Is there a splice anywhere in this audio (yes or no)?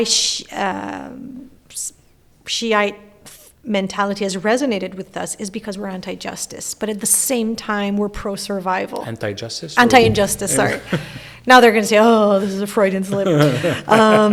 no